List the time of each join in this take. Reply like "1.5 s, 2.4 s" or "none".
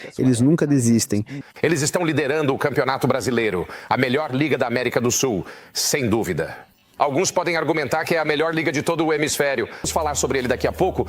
1.4 s, 9.8 s

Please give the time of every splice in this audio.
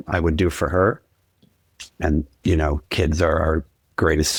none

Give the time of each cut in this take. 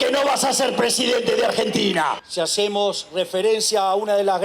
2.2 s

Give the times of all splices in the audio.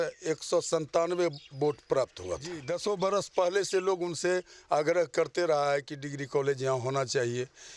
2.6 s

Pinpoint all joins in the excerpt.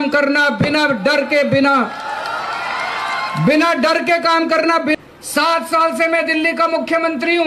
4.9 s

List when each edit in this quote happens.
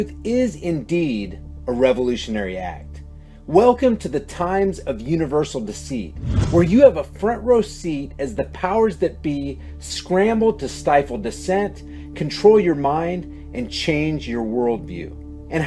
13.5 s

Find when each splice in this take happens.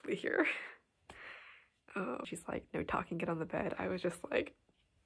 2.3 s

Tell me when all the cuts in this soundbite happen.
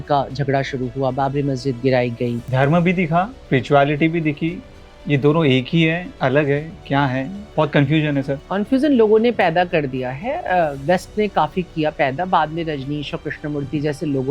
2.4 s, 3.4 s, 7.4 s, 8.4 s

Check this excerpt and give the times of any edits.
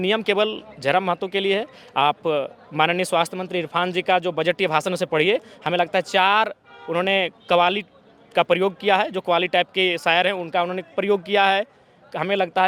none

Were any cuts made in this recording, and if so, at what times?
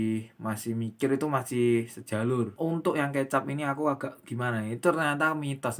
2.7 s

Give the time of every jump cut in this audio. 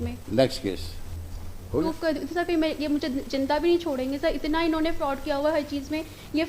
1.8 s

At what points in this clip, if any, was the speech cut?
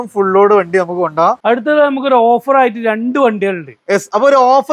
1.4 s

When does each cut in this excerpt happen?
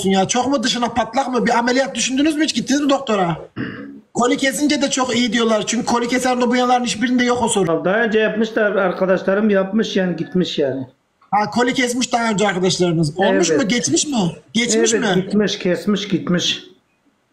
3.5 s, 7.7 s

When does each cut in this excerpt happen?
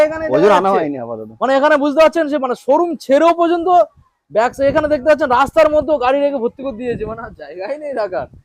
none

